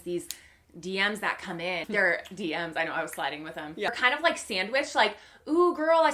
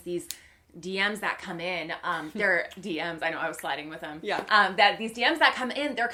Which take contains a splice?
first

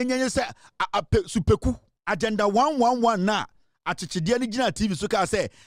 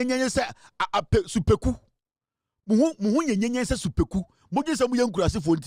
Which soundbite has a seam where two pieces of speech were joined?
first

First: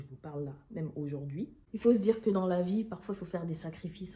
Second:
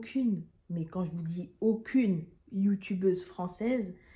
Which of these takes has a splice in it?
first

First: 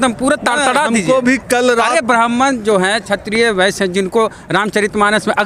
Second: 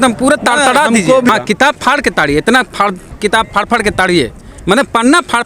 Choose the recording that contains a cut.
second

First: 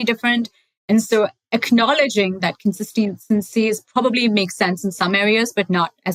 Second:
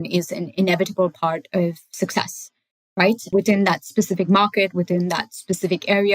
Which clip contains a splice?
second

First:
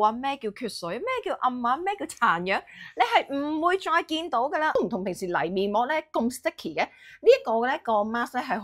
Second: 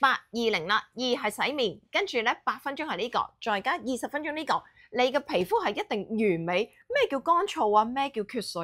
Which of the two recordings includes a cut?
first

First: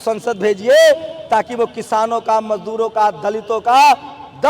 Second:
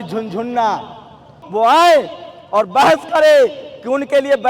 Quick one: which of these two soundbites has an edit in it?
second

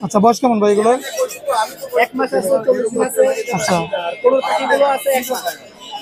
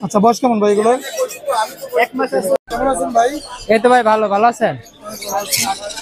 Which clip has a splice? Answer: second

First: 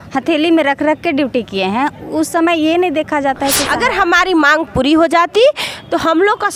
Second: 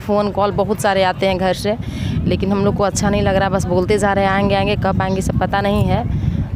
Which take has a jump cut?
first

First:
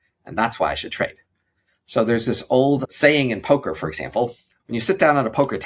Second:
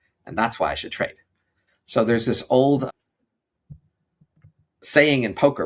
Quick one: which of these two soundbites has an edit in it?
first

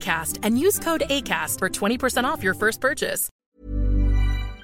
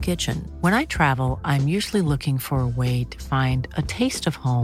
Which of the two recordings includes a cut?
first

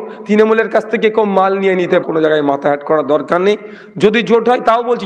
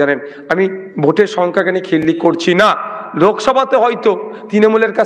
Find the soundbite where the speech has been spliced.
first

